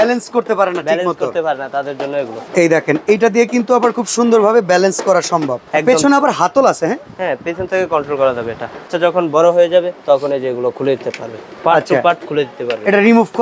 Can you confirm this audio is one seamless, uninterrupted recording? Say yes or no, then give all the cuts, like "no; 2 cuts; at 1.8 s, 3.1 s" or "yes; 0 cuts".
no; 4 cuts; at 2.4 s, 5.6 s, 8.9 s, 9.9 s